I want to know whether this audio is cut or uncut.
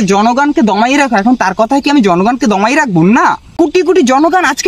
cut